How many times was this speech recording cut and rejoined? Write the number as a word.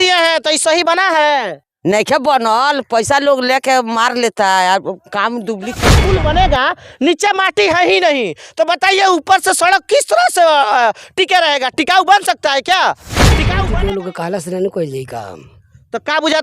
two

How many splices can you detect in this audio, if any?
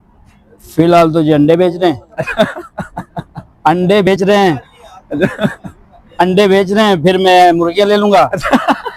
zero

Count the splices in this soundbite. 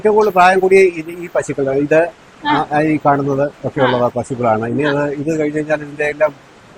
zero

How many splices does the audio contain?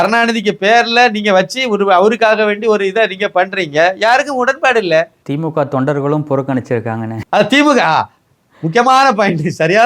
one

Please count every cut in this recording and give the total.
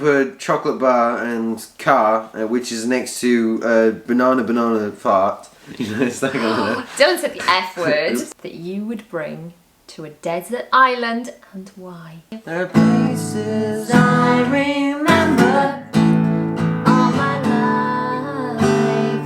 two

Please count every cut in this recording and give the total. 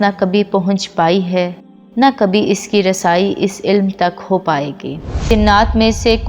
one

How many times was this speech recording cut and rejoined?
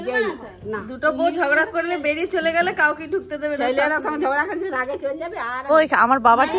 one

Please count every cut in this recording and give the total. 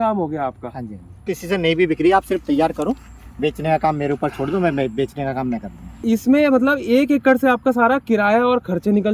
two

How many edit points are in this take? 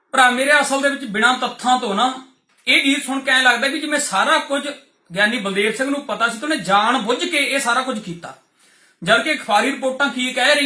zero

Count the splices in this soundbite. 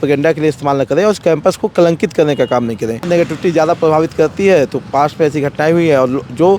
one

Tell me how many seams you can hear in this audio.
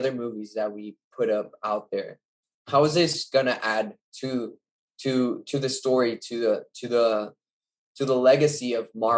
zero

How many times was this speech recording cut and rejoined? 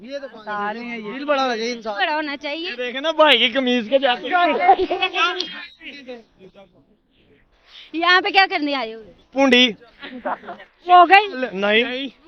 zero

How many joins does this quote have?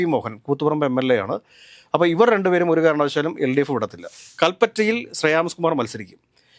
one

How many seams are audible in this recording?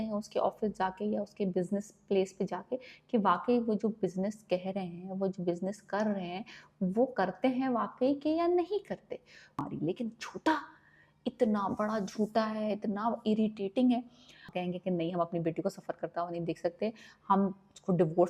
two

